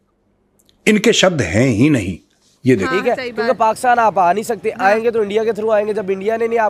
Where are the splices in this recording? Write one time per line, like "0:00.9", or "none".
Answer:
0:02.9